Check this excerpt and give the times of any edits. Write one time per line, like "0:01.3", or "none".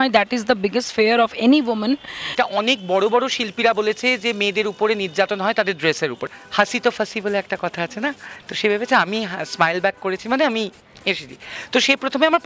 0:02.2
0:06.3